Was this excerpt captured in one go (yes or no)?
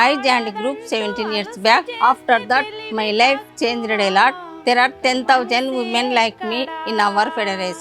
no